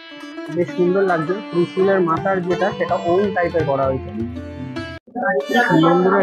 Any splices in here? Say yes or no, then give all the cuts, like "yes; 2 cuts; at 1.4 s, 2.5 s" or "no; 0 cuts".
yes; 1 cut; at 5.1 s